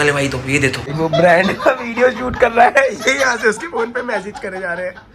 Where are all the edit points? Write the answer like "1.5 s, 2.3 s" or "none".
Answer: 0.9 s